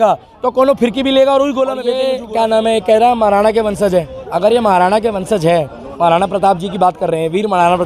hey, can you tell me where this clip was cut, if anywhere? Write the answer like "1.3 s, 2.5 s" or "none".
2.0 s